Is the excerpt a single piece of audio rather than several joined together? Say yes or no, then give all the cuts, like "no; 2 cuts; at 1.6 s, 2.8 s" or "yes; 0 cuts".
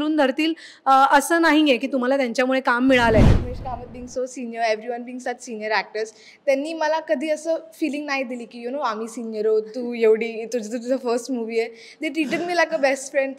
no; 1 cut; at 3.4 s